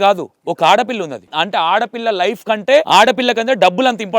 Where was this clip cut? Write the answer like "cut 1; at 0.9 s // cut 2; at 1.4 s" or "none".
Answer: cut 1; at 1.3 s // cut 2; at 2.9 s

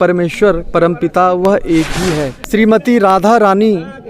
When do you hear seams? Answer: cut 1; at 2.3 s

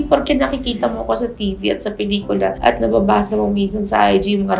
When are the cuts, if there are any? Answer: none

